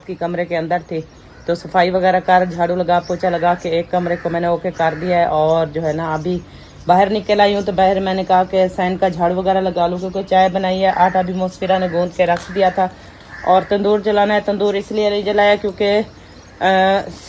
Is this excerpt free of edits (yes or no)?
yes